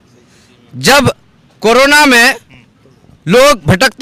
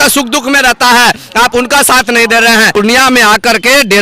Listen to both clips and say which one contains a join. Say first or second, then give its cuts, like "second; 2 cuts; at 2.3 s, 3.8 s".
second; 1 cut; at 2.8 s